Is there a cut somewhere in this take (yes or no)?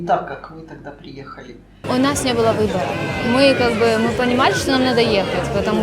yes